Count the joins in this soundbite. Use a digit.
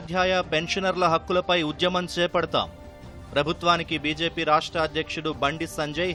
0